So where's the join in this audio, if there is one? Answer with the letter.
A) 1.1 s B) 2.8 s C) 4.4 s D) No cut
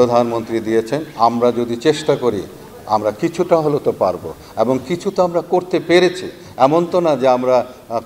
A